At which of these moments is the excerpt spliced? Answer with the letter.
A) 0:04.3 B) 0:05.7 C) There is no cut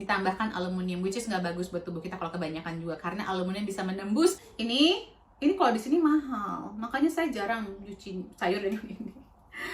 A